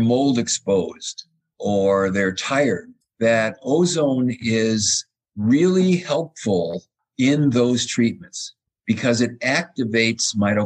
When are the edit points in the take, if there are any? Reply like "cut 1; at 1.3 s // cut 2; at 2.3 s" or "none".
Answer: none

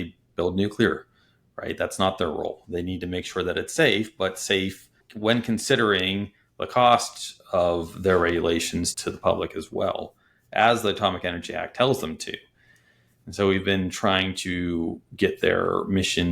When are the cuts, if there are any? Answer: cut 1; at 5.0 s // cut 2; at 8.9 s

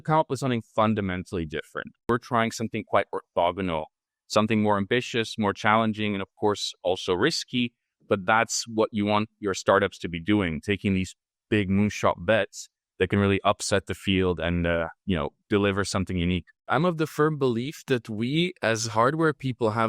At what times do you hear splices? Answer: cut 1; at 2.1 s // cut 2; at 16.6 s

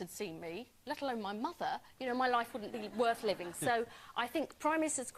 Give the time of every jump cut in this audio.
none

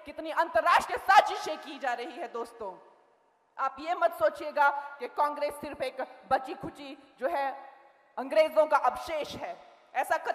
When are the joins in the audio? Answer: none

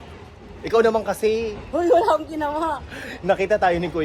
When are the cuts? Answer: none

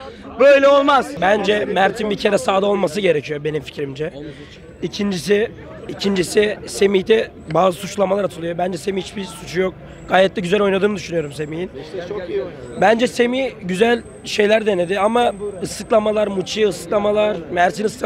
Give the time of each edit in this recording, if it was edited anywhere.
none

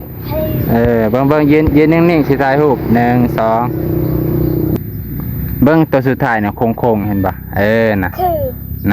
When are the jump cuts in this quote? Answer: cut 1; at 4.8 s

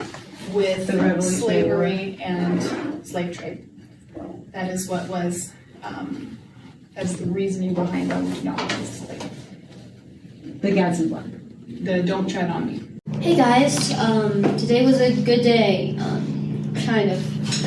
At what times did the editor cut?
cut 1; at 13.1 s

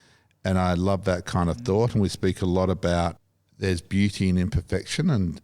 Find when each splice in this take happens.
cut 1; at 3.2 s

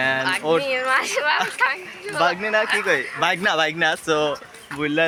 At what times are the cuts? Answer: none

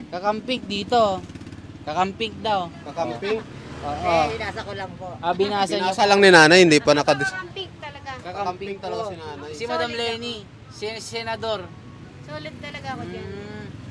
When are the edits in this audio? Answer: none

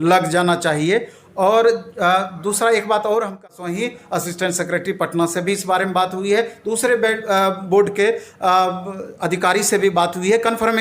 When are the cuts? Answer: cut 1; at 3.5 s

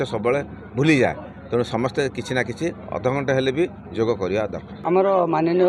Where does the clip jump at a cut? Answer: cut 1; at 4.7 s

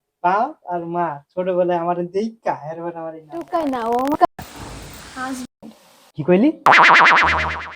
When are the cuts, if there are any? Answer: cut 1; at 3.5 s

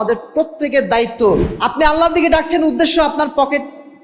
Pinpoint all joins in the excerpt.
cut 1; at 1.5 s

